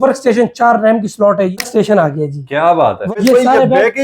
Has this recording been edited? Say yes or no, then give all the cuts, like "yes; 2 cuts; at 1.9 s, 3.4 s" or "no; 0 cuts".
yes; 2 cuts; at 1.6 s, 3.1 s